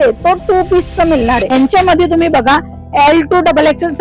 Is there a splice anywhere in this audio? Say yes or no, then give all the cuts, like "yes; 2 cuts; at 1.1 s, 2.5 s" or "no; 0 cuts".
yes; 1 cut; at 1.5 s